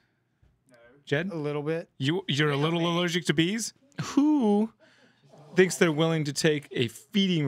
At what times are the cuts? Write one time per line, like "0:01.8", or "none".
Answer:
0:03.8